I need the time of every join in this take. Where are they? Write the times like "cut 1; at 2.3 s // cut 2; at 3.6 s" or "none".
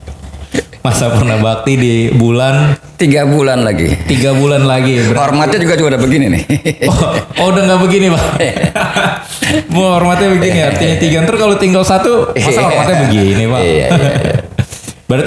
none